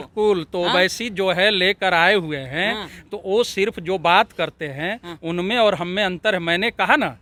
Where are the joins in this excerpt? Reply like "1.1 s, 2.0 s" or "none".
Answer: none